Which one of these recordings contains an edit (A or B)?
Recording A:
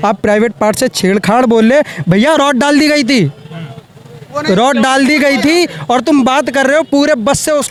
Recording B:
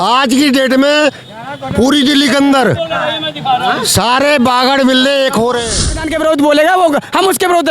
B